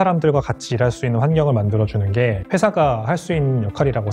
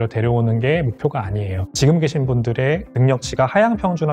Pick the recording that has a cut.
second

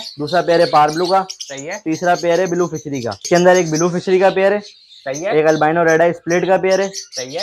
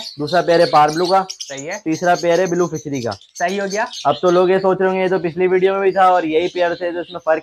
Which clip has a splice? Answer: first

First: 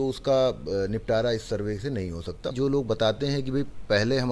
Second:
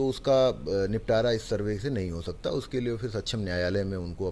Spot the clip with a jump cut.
first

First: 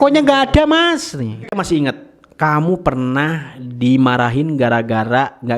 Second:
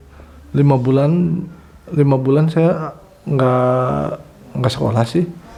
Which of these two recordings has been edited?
first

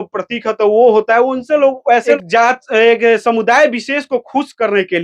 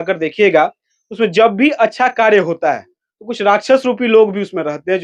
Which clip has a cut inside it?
first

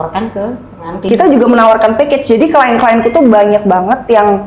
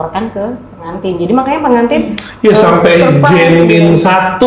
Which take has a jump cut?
first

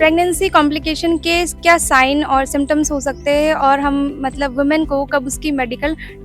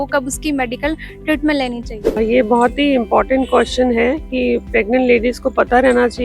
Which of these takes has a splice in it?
second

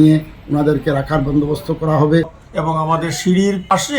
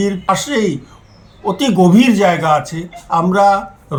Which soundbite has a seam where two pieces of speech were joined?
first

